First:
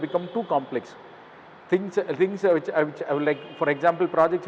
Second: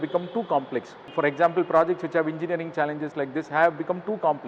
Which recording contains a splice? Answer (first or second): second